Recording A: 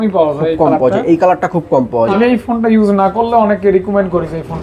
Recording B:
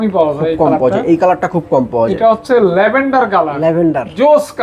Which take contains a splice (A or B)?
A